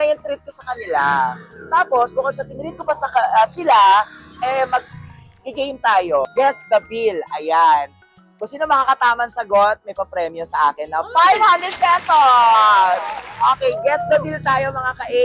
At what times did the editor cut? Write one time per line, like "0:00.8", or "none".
0:06.3